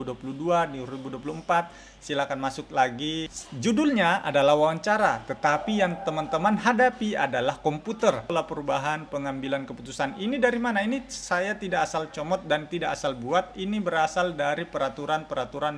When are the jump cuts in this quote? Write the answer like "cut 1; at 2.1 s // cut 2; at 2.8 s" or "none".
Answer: cut 1; at 3.4 s // cut 2; at 8.3 s